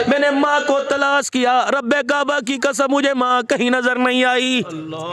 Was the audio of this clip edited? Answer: no; 0 cuts

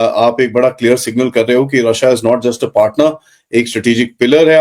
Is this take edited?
no; 0 cuts

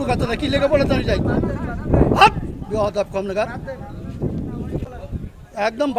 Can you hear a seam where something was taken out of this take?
yes; 1 cut; at 4.8 s

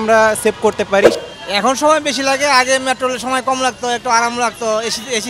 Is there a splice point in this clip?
yes; 1 cut; at 1.1 s

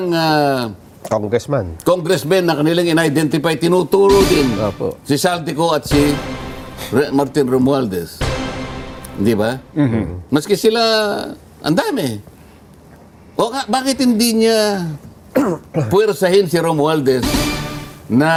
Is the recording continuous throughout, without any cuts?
yes; 0 cuts

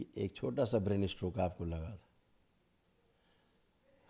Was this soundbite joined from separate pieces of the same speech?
no; 0 cuts

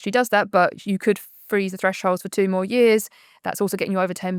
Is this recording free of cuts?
yes; 0 cuts

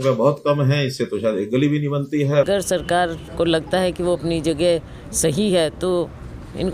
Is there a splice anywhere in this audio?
yes; 1 cut; at 2.5 s

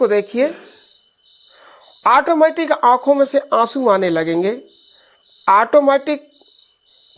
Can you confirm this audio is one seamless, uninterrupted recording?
yes; 0 cuts

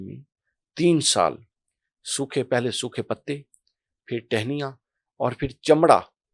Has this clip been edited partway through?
no; 0 cuts

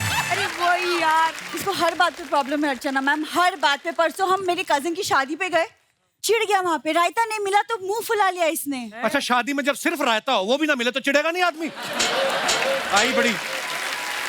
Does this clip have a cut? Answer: yes; 1 cut; at 1.5 s

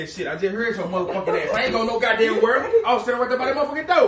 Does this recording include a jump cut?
no; 0 cuts

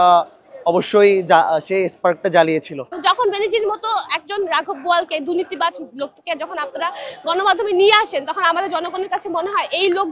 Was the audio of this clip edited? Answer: yes; 1 cut; at 2.8 s

